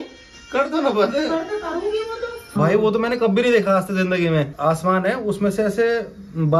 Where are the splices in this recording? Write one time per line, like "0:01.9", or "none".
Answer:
0:02.5
0:04.5